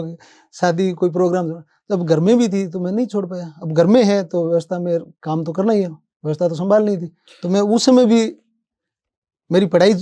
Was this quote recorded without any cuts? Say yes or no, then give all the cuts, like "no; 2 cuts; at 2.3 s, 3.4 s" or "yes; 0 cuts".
yes; 0 cuts